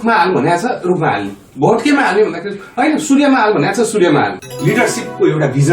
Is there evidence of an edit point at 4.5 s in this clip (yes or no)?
yes